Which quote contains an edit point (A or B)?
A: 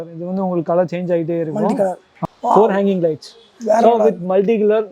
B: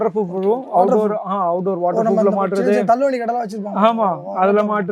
A